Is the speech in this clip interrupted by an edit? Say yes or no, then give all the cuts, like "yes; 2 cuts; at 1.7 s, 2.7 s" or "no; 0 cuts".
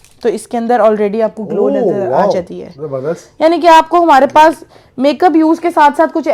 no; 0 cuts